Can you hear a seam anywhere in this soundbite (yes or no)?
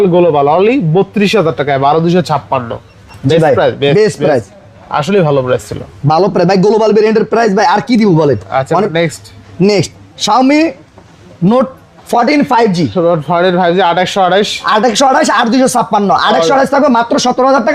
no